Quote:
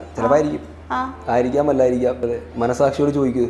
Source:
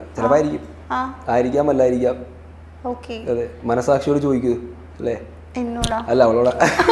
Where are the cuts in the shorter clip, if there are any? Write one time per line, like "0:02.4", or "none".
0:02.2